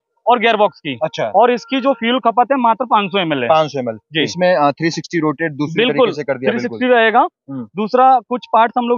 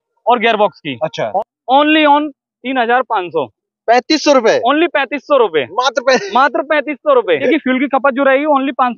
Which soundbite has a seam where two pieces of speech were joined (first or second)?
second